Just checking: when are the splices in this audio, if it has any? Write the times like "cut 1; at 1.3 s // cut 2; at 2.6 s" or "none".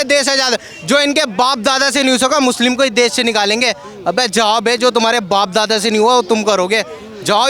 none